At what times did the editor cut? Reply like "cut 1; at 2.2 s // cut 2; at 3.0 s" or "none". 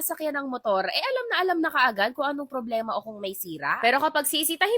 cut 1; at 3.8 s